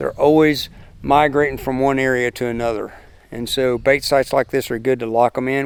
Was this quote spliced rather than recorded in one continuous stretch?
no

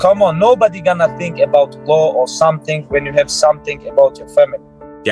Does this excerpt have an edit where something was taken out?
no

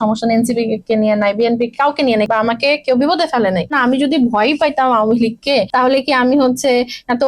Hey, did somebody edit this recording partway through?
yes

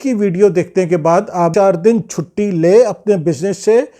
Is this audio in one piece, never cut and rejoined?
no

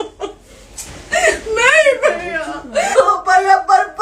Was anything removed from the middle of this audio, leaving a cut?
yes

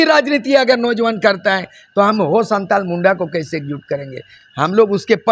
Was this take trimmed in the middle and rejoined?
no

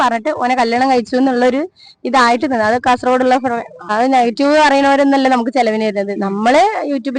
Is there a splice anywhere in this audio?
yes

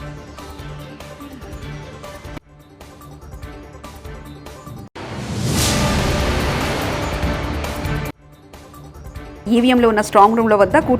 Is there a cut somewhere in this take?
yes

